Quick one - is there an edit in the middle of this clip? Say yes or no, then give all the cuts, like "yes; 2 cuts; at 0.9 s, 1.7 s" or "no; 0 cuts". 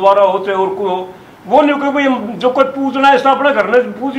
no; 0 cuts